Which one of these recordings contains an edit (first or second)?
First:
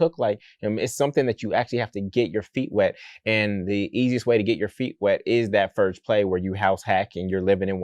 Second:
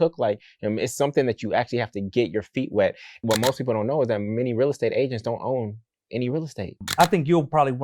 second